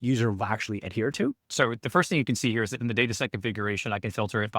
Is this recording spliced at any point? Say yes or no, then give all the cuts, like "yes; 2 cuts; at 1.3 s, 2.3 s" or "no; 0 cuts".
yes; 1 cut; at 1.5 s